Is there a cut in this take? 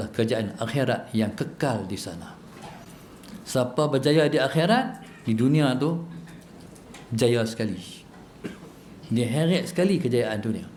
no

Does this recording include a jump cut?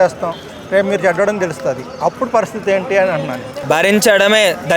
yes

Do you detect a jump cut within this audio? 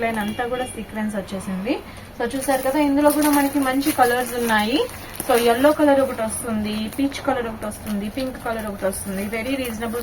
no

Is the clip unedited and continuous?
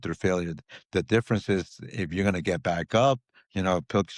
yes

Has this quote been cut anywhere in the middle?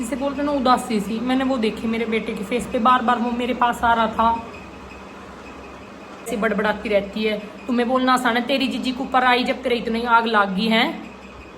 yes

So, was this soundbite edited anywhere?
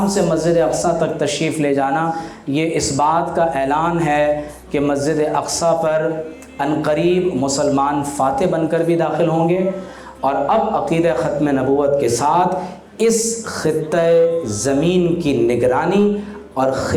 no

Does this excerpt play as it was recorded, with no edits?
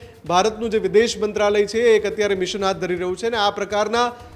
yes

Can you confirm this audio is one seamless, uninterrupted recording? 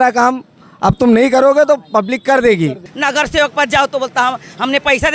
no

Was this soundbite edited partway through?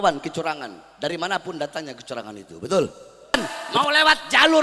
yes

